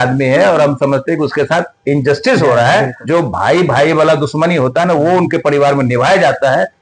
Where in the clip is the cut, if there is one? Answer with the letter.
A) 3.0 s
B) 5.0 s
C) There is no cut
A